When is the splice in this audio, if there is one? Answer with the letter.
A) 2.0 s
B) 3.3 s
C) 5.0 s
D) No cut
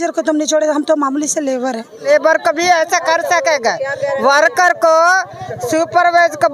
A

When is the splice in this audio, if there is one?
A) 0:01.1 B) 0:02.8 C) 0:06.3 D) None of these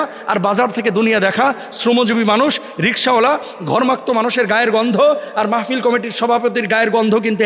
D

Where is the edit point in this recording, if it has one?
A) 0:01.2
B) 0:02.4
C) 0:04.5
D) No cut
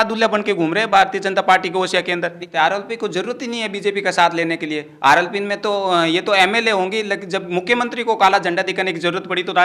B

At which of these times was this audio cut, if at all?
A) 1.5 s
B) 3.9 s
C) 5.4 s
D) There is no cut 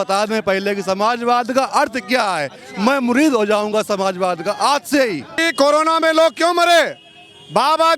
C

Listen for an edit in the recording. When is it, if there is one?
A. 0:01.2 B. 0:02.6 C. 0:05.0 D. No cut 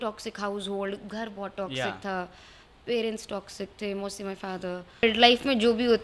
C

